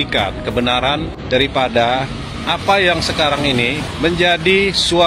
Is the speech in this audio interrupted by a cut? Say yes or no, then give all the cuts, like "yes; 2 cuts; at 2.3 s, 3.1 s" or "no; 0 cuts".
yes; 2 cuts; at 1.2 s, 3.8 s